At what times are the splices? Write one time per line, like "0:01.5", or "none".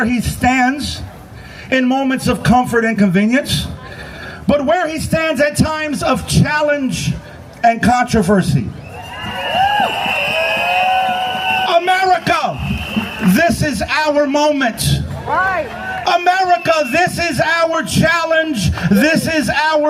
none

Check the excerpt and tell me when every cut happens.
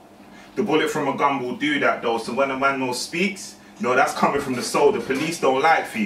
0:02.1

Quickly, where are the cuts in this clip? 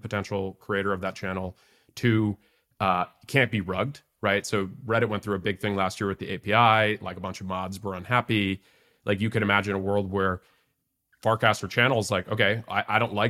none

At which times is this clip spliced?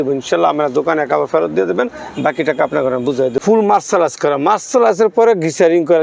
0:03.4

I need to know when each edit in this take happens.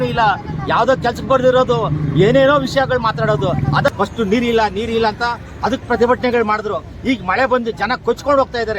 0:03.9

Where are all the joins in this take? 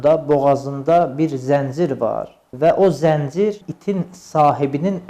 0:02.4
0:03.7

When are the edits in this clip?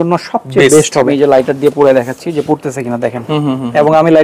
0:01.1

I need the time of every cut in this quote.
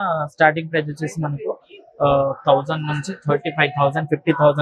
none

